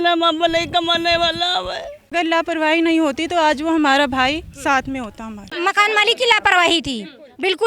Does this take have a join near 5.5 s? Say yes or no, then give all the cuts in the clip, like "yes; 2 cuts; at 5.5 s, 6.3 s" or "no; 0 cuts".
yes; 2 cuts; at 2.1 s, 5.5 s